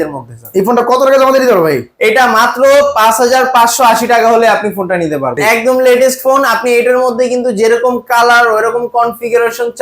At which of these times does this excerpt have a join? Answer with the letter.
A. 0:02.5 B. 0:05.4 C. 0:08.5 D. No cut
B